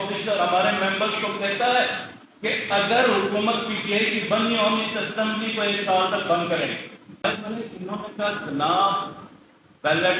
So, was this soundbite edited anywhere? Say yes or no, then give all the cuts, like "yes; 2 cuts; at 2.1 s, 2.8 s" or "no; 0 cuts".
yes; 1 cut; at 7.2 s